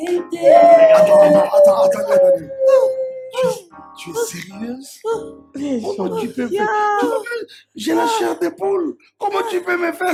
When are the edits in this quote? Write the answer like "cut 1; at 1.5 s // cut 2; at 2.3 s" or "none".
none